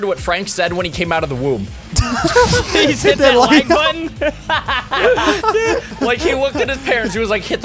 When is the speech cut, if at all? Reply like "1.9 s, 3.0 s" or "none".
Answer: none